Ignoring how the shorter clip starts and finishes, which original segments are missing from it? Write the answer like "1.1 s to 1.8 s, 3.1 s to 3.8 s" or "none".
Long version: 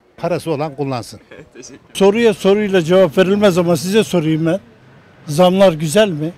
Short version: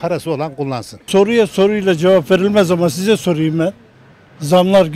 1.1 s to 1.8 s